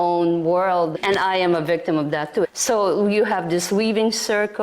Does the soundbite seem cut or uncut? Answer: cut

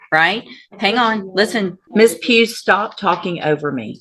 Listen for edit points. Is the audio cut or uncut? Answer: cut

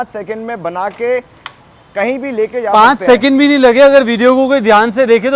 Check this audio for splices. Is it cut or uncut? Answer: uncut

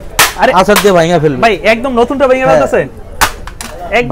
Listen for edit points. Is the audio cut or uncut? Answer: uncut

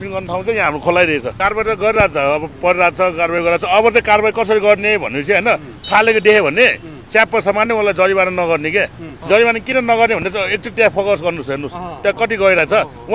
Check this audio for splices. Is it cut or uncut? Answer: cut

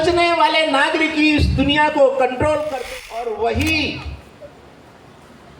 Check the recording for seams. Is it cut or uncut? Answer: cut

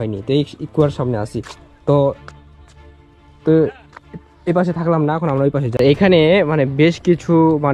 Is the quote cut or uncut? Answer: cut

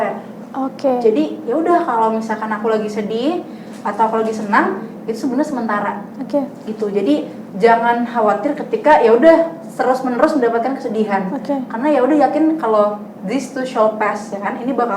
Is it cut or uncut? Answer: uncut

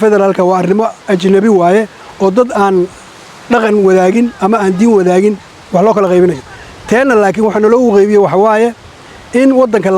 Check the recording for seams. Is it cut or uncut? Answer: uncut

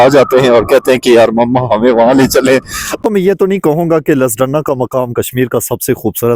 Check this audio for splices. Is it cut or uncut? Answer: cut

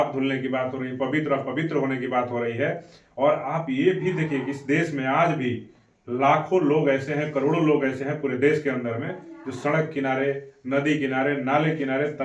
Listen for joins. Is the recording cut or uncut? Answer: uncut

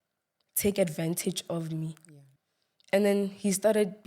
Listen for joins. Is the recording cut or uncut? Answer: cut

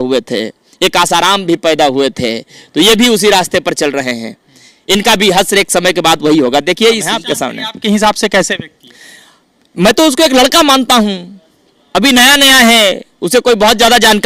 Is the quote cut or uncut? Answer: cut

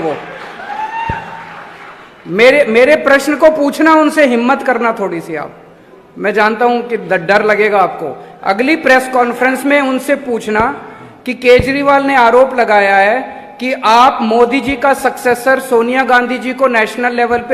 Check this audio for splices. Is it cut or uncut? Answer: uncut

